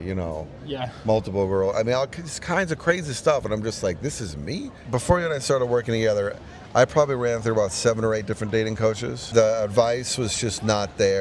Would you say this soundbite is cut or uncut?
cut